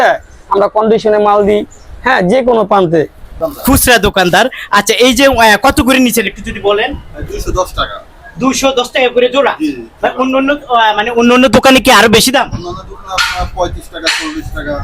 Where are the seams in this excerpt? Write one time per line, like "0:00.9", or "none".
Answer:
0:03.4